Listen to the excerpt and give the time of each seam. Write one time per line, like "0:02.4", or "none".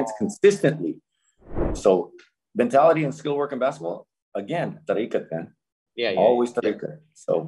0:01.7